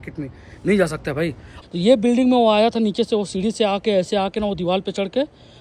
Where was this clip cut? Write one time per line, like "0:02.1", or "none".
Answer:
0:01.4